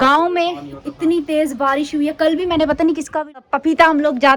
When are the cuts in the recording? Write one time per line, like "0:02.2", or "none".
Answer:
0:03.4